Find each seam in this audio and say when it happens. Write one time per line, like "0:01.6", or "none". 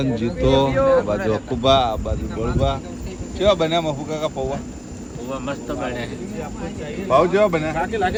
none